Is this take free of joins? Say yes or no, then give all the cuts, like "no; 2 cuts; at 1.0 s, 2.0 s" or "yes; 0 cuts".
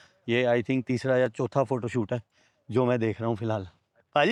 yes; 0 cuts